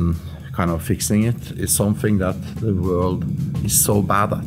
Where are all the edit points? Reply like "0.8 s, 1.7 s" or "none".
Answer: none